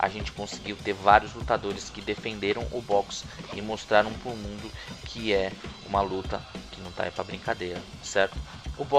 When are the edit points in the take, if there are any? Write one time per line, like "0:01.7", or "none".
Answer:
none